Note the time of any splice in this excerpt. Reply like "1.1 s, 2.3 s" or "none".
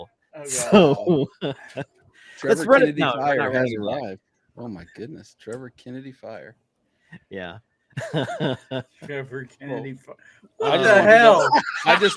none